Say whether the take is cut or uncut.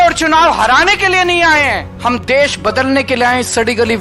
cut